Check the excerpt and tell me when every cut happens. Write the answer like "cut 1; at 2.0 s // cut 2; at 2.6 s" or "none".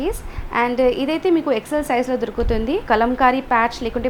cut 1; at 2.8 s